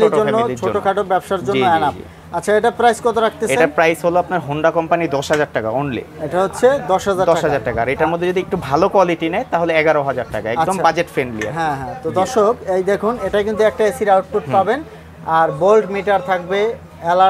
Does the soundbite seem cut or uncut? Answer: uncut